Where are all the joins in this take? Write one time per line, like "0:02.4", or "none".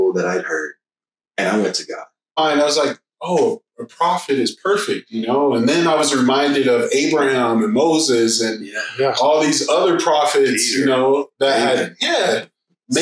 0:02.4